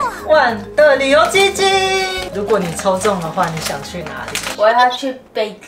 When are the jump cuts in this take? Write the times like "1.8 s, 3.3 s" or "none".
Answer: 2.2 s, 4.4 s